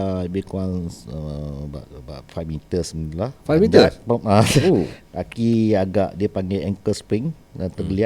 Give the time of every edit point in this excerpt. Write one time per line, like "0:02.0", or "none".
none